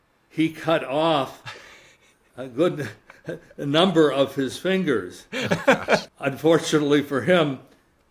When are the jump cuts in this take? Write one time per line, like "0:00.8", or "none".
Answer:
0:06.1